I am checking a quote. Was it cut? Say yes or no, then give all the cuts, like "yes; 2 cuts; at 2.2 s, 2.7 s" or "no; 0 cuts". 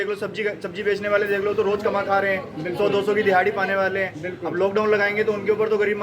no; 0 cuts